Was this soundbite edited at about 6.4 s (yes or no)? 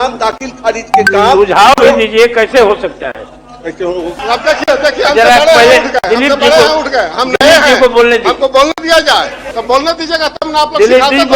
no